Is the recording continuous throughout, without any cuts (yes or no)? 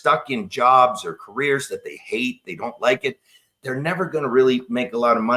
yes